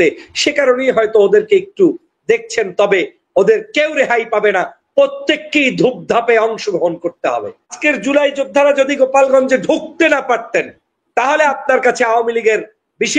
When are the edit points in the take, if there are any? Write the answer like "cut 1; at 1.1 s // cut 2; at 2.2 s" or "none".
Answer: cut 1; at 7.8 s